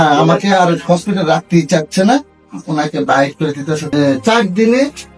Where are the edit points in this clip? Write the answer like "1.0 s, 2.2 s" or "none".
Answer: 3.8 s